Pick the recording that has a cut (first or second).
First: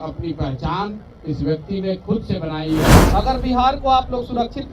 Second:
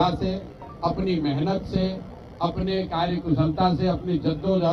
first